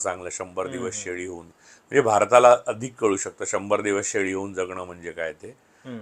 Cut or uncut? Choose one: uncut